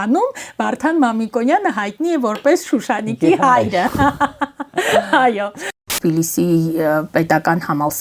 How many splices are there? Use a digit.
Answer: 1